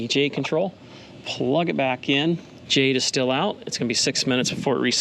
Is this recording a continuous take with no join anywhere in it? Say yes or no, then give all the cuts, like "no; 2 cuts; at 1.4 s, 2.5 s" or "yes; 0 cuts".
no; 1 cut; at 2.5 s